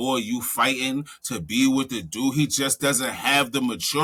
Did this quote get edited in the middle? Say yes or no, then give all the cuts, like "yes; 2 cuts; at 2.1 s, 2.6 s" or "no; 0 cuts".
no; 0 cuts